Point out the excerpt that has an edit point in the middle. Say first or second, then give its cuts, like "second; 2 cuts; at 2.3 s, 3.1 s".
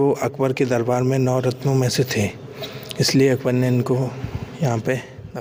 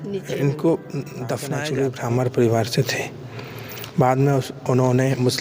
second; 1 cut; at 1.6 s